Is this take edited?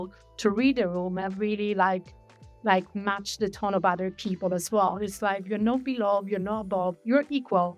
no; 0 cuts

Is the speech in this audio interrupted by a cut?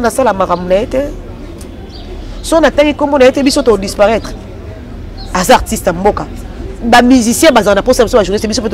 no; 0 cuts

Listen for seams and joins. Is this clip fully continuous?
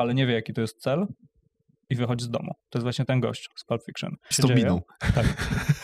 no; 2 cuts; at 2.6 s, 4.3 s

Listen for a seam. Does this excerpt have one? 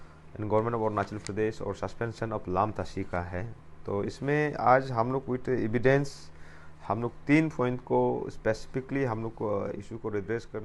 no; 0 cuts

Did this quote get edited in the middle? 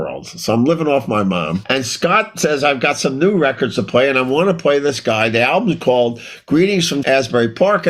yes; 1 cut; at 1.6 s

